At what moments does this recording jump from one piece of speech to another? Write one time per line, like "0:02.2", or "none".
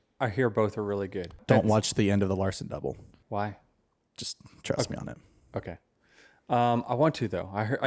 0:01.4
0:03.1

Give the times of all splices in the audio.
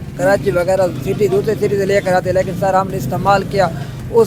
none

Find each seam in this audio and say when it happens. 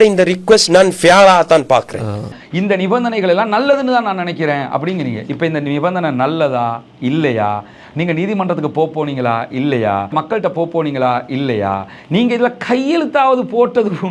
0:10.1

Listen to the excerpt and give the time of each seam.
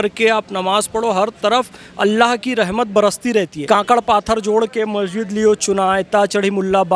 0:03.6

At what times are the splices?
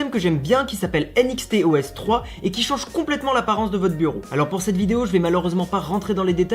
0:01.0

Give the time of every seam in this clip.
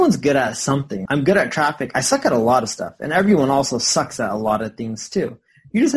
0:01.0

